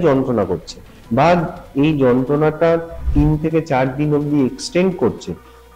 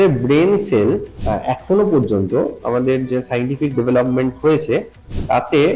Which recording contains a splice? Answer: second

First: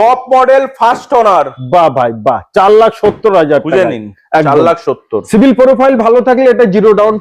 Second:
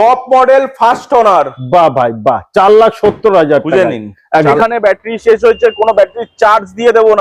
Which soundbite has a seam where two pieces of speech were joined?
second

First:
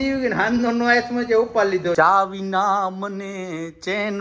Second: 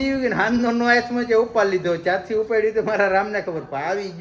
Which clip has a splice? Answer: first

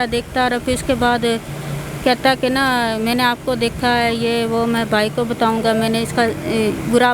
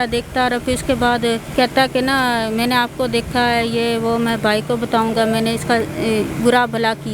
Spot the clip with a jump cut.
second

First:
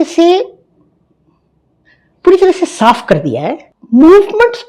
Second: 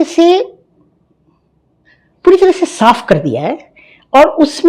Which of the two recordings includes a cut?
first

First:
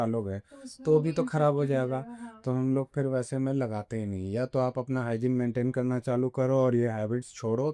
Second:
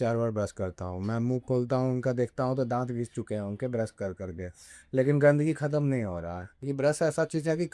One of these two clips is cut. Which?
second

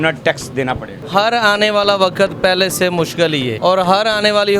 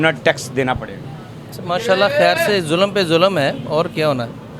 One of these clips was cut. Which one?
first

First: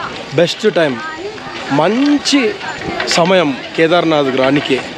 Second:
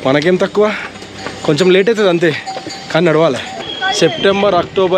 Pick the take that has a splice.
second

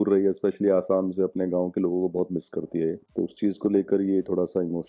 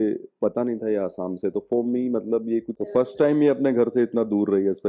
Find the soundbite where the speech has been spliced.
second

